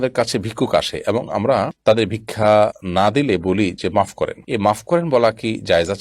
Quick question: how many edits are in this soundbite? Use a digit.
1